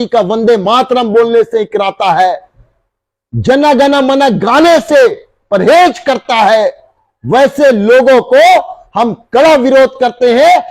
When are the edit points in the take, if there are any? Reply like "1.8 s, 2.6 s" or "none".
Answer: none